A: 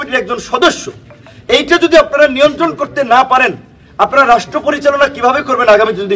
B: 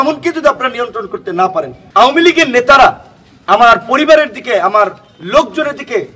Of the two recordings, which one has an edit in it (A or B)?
B